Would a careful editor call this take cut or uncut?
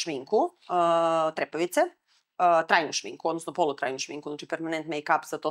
uncut